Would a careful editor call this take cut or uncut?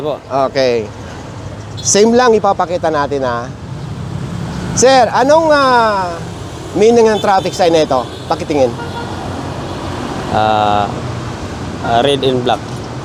uncut